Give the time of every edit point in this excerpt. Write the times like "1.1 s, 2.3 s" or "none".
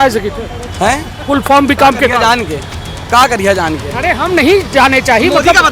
none